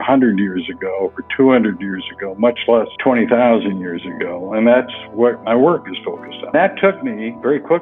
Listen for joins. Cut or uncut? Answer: cut